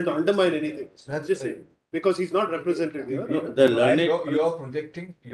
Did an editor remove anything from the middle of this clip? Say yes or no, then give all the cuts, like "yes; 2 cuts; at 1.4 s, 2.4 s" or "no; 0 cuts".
no; 0 cuts